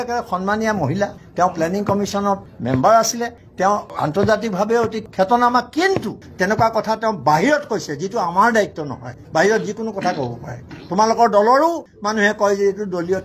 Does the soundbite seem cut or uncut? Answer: cut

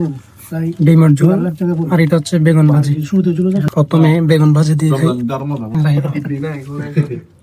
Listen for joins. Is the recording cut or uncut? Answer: cut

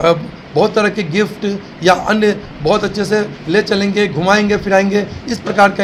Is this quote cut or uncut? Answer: uncut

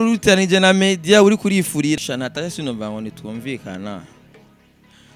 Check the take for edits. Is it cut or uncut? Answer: cut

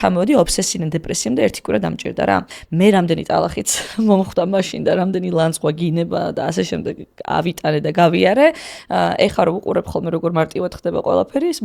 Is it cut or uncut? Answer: cut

